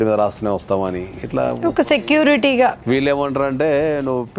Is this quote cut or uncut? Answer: cut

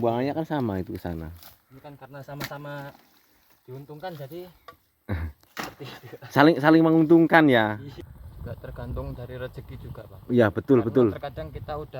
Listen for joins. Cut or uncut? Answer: cut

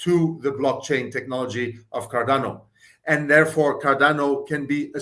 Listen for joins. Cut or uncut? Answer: uncut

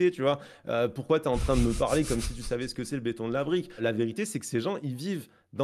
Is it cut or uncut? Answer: cut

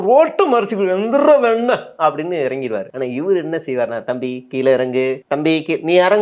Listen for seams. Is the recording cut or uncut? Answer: cut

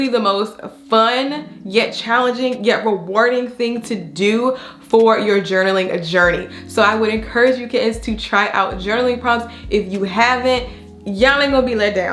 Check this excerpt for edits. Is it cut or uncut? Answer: uncut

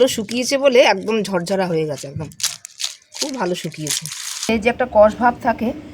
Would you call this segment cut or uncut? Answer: cut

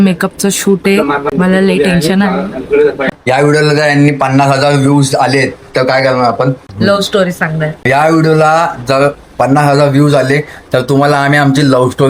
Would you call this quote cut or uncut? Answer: cut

